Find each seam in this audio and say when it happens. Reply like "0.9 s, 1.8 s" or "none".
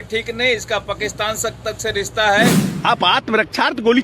2.7 s

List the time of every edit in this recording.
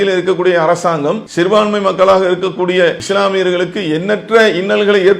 1.2 s, 3.0 s

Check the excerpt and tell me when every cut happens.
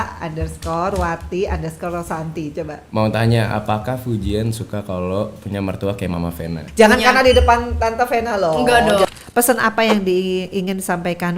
6.6 s, 9.1 s

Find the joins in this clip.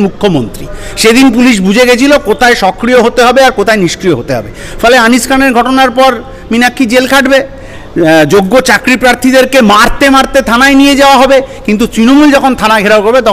none

